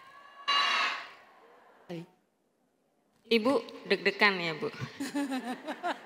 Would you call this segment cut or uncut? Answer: cut